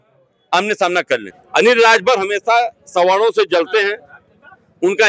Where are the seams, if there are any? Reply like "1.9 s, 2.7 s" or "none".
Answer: 1.4 s